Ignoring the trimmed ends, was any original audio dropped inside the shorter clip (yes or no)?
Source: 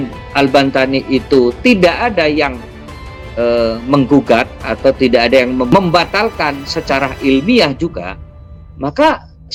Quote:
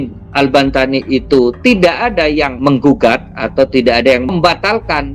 yes